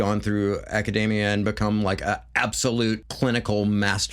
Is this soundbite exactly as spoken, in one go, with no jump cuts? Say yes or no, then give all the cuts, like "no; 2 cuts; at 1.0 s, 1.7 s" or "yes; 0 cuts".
no; 1 cut; at 3.1 s